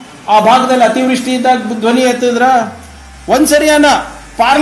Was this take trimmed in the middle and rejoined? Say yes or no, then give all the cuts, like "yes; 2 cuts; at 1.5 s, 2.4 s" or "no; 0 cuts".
no; 0 cuts